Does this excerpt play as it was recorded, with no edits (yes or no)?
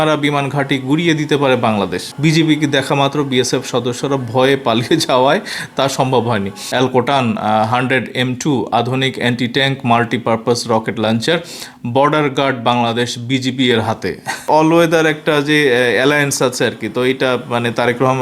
no